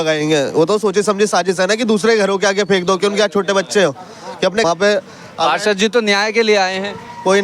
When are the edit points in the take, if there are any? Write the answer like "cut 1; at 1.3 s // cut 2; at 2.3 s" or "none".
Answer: cut 1; at 4.6 s